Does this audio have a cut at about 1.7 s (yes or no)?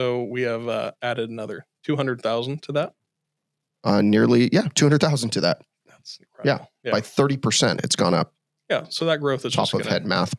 yes